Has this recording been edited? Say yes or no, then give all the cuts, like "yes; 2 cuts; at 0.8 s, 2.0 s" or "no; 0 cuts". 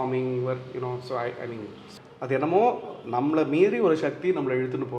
yes; 1 cut; at 1.9 s